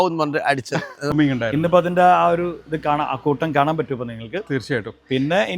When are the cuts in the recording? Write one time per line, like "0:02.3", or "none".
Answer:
0:01.1